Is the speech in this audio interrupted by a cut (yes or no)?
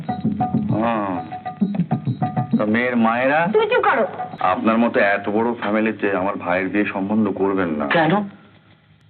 yes